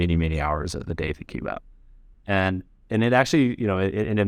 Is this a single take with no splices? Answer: yes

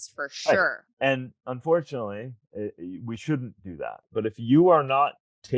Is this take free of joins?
no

